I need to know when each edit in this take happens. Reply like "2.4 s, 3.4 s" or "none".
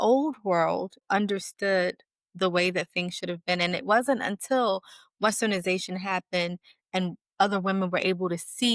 1.0 s